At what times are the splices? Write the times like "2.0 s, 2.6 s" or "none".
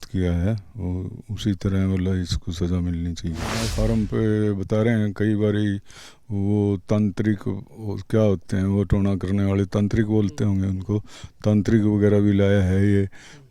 3.7 s

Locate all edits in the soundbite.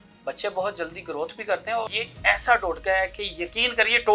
1.9 s

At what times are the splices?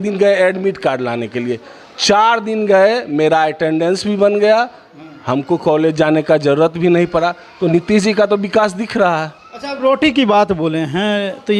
none

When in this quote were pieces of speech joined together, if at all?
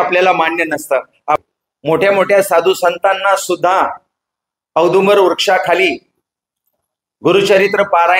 1.4 s

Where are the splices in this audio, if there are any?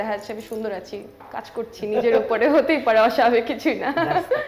none

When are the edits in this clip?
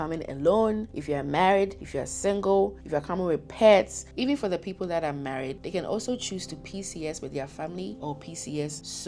2.8 s, 4.0 s

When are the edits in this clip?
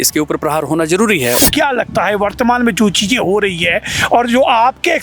1.4 s

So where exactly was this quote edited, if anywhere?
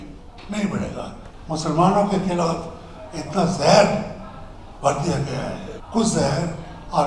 1.2 s, 5.7 s

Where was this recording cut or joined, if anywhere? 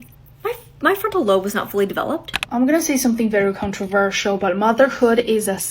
2.4 s

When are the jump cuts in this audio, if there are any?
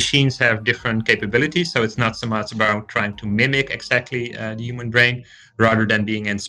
none

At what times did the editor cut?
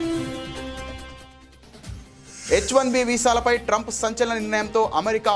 2.5 s

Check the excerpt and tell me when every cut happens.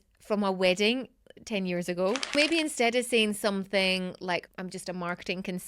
2.3 s, 4.4 s

